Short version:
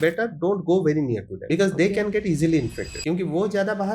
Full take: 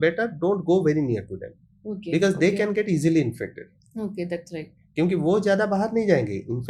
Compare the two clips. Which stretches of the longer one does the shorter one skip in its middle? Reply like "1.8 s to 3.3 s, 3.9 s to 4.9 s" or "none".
1.3 s to 2.0 s, 3.5 s to 4.8 s